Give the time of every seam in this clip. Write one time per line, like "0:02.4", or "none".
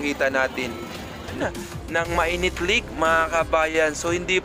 0:01.4